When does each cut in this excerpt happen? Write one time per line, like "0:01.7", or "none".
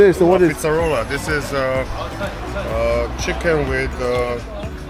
none